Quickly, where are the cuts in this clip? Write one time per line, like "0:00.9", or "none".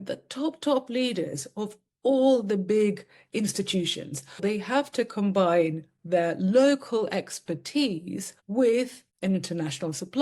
0:04.4
0:09.0